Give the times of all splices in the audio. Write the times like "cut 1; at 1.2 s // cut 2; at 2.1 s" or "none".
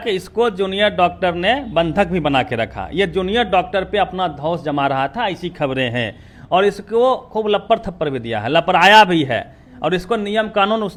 none